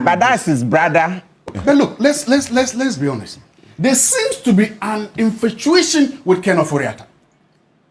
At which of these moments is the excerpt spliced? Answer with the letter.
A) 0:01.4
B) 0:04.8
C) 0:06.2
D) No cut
A